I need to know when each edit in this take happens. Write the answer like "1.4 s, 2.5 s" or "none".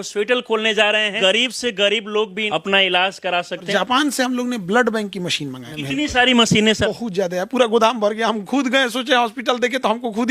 1.1 s, 2.4 s, 3.7 s, 5.7 s, 6.8 s